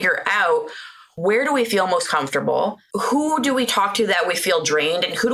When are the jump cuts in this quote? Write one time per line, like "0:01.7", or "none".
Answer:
0:01.1
0:02.8